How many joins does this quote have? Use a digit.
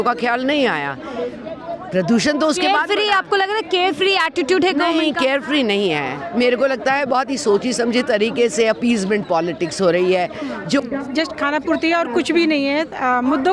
1